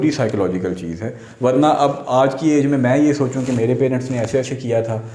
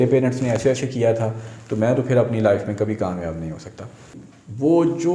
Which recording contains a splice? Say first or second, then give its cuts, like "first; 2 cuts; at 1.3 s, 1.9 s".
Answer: second; 1 cut; at 4.2 s